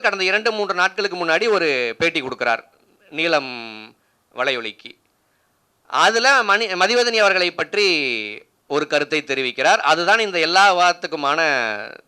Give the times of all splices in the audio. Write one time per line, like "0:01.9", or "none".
none